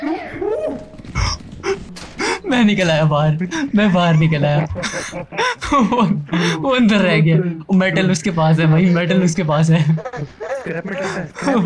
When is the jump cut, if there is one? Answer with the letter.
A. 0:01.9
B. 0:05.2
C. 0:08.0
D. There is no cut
A